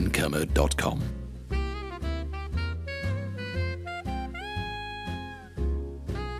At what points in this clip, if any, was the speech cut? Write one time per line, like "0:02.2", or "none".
0:01.1